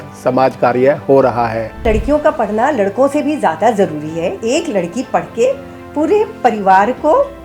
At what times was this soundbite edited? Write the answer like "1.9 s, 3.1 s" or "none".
1.8 s, 4.4 s